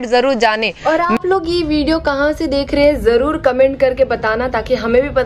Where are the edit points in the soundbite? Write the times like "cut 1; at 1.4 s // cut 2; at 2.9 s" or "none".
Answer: none